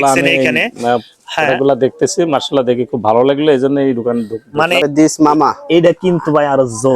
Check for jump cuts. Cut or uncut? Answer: cut